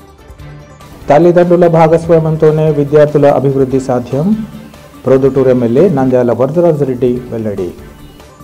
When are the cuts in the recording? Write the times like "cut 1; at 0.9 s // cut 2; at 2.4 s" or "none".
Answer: none